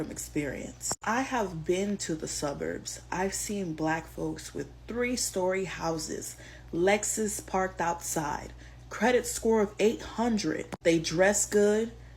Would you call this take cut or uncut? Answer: uncut